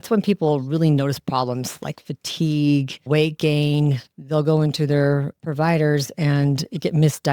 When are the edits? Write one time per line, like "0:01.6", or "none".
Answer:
0:02.9
0:04.0